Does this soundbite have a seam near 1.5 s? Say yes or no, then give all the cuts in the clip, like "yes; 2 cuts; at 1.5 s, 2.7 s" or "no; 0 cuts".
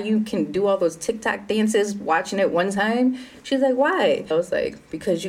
no; 1 cut; at 4.3 s